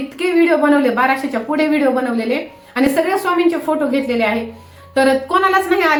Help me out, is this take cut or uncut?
uncut